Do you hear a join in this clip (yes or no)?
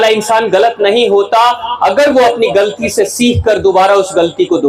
no